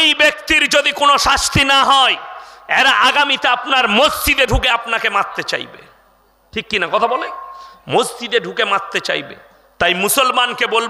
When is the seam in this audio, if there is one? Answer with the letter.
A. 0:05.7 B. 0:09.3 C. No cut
C